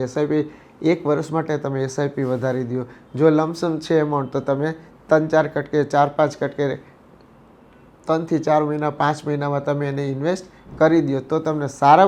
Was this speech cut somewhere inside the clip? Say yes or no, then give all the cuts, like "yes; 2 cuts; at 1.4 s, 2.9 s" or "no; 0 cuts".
no; 0 cuts